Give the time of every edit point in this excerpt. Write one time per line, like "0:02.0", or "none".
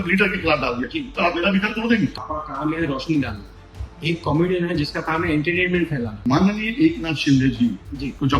0:02.2
0:06.1